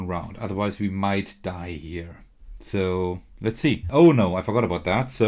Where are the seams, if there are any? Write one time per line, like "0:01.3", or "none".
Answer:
0:03.8